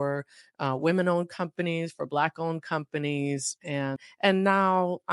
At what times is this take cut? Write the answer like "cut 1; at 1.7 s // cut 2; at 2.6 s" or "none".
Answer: cut 1; at 4.0 s